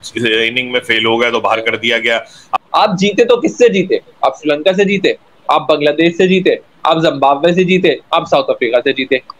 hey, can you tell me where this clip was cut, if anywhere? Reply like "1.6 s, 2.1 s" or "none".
2.5 s